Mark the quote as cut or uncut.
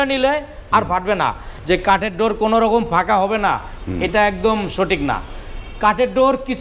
cut